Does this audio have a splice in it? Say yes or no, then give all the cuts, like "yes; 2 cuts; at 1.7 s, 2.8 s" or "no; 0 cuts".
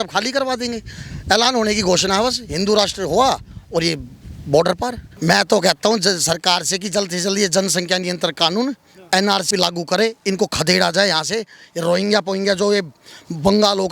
yes; 2 cuts; at 5.1 s, 9.5 s